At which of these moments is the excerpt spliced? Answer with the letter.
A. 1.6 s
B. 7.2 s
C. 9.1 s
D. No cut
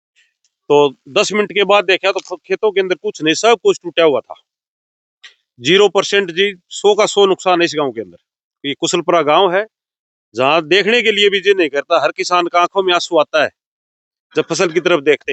D